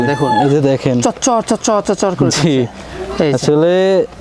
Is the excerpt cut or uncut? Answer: uncut